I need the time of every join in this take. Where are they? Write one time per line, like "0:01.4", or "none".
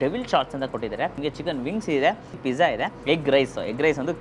0:01.2
0:02.5